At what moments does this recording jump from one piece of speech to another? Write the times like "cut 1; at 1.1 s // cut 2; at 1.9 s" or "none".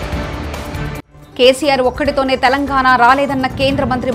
none